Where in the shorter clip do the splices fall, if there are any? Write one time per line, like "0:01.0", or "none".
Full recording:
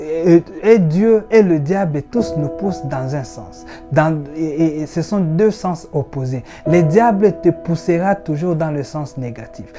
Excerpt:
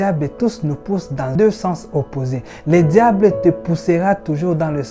0:01.3